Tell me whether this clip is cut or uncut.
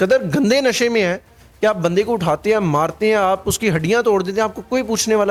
uncut